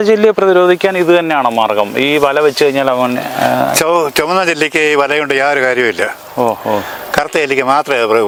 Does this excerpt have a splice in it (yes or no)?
no